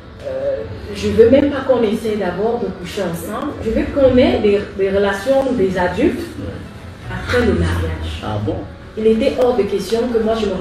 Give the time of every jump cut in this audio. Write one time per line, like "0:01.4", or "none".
0:03.5
0:08.7